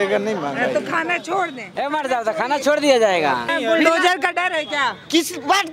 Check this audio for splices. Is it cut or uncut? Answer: cut